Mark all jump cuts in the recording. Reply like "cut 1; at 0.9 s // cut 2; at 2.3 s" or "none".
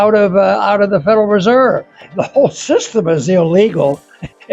cut 1; at 2.1 s